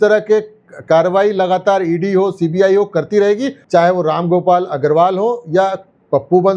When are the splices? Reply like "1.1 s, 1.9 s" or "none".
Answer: 3.5 s